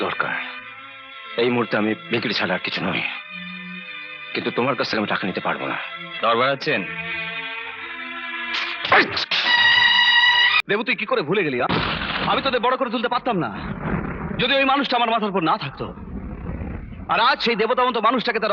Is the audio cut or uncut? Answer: cut